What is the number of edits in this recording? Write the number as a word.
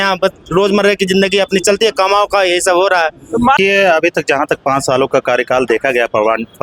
one